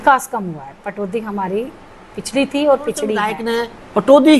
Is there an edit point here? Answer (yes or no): yes